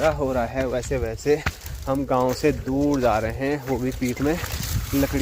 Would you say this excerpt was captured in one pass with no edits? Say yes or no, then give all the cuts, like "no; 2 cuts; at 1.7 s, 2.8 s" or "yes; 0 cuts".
yes; 0 cuts